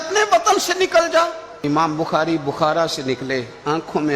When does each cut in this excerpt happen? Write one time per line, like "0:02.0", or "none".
0:01.5